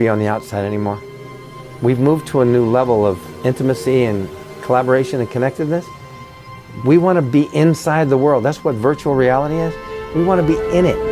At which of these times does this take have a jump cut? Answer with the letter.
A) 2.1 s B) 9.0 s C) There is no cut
B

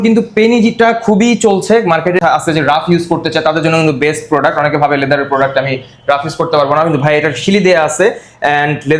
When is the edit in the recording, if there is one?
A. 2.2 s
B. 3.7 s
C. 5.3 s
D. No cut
A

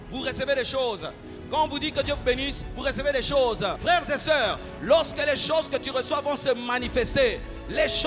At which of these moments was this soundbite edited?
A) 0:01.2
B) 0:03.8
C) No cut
B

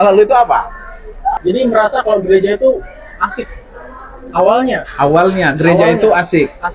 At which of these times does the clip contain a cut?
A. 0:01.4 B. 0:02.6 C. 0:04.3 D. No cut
A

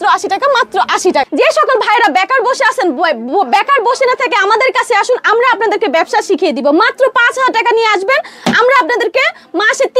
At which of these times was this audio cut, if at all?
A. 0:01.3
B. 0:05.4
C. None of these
A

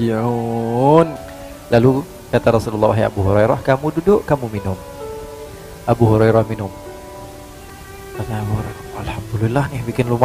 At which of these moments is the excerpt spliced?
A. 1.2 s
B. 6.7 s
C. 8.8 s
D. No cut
A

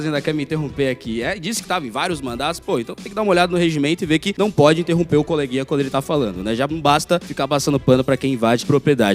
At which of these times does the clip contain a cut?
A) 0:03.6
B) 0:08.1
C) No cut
C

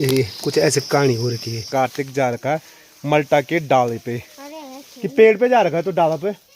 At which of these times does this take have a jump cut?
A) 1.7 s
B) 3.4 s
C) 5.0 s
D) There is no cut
A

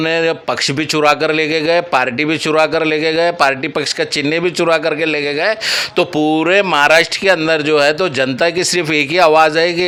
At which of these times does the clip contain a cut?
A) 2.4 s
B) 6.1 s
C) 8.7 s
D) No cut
D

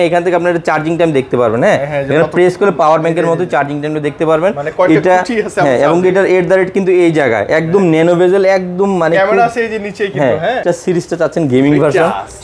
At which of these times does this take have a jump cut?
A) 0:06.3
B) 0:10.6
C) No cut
B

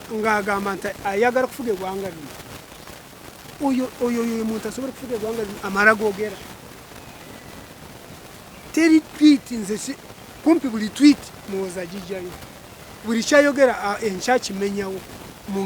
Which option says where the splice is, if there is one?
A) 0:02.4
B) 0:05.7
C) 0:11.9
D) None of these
D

